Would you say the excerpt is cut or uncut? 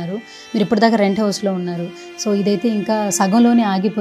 uncut